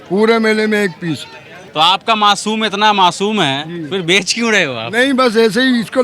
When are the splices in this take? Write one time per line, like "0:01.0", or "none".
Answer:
0:01.6